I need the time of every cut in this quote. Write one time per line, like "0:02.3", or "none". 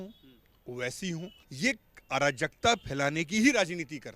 0:01.4